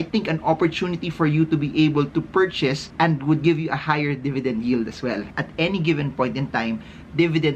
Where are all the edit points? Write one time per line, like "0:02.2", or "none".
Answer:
0:02.8
0:05.3